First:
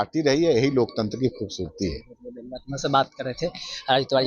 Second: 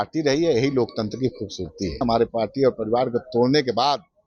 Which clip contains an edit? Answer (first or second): second